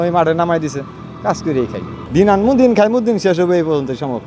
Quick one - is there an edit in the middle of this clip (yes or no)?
no